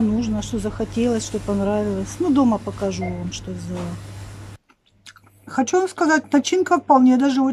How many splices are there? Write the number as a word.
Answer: one